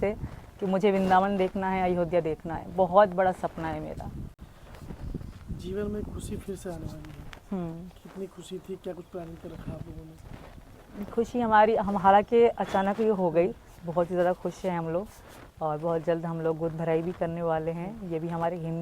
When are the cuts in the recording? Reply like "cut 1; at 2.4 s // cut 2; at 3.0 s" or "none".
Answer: none